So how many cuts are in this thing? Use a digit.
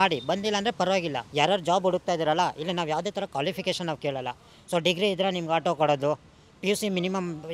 1